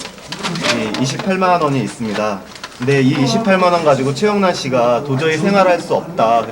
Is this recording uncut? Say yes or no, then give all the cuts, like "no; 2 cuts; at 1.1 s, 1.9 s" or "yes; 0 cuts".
yes; 0 cuts